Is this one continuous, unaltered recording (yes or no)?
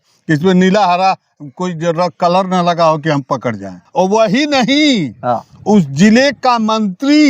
no